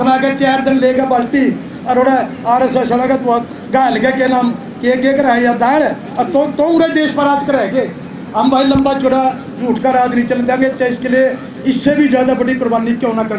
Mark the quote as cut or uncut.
uncut